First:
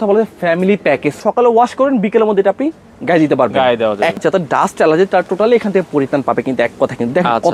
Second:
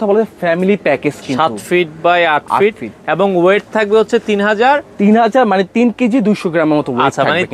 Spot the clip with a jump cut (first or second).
first